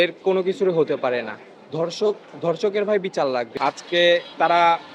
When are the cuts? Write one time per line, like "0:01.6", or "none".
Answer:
0:03.5